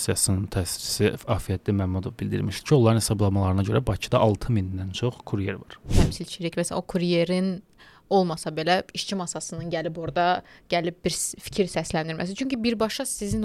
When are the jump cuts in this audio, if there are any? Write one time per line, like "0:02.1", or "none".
0:05.9

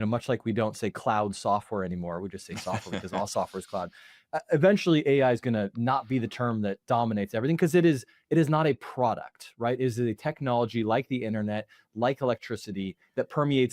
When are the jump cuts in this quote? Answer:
none

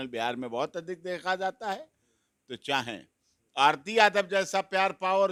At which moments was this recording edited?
none

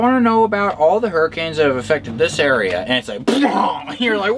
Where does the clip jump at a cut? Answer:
none

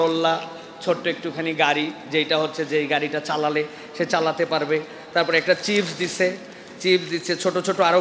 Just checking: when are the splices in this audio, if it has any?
none

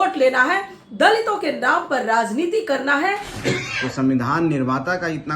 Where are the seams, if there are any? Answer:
0:03.3

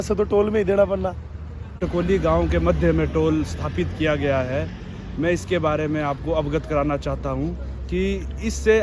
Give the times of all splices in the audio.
0:01.8

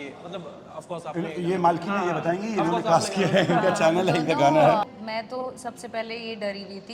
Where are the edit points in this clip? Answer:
0:04.8

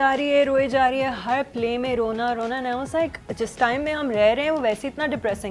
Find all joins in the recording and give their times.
0:03.2

